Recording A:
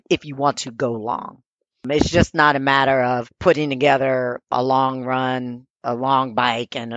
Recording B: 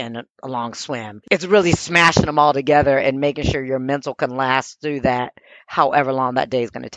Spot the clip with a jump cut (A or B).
A